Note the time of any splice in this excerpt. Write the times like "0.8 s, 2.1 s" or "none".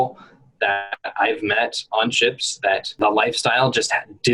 2.9 s

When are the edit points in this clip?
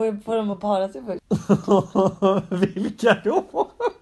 1.1 s

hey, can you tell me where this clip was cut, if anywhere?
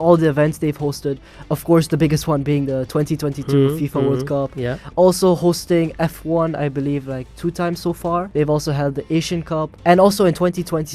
8.3 s, 9.7 s

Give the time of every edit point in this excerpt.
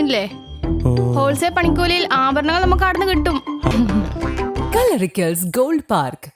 3.7 s

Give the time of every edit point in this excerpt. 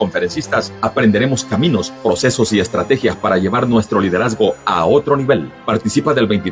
2.2 s

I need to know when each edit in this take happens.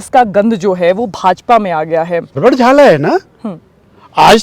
2.4 s

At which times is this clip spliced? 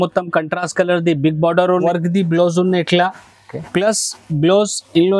1.8 s

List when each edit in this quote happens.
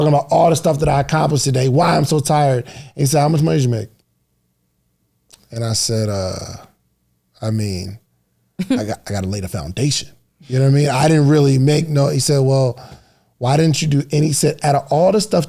none

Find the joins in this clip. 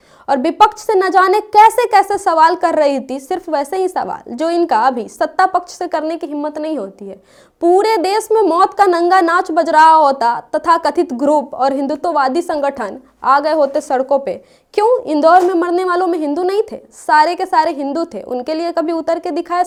none

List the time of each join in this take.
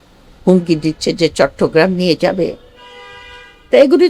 none

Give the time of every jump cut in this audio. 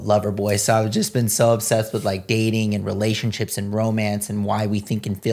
none

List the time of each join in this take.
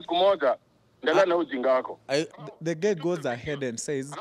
2.3 s

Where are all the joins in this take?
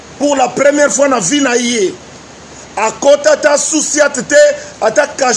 none

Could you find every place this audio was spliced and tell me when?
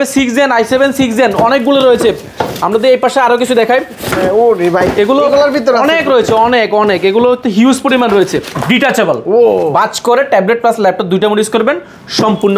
8.5 s

